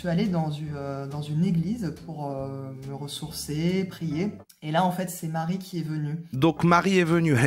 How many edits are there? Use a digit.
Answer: 2